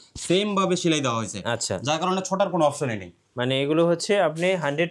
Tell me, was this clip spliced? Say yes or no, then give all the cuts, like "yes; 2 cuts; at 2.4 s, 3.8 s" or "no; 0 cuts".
no; 0 cuts